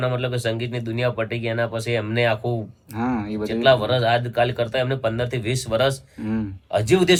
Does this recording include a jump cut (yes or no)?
no